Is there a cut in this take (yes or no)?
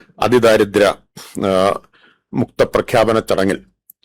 no